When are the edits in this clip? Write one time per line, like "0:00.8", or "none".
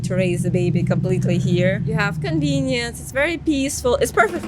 0:01.8